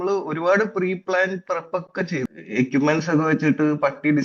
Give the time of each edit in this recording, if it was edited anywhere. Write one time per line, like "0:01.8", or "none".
0:02.3